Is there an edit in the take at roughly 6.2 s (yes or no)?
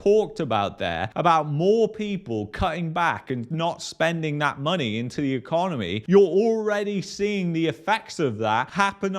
no